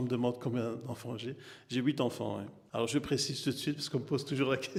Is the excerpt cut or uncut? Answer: uncut